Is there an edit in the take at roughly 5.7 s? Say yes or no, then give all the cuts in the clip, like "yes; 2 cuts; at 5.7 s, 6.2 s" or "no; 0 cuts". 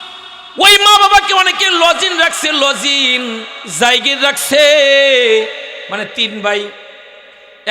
yes; 1 cut; at 5.7 s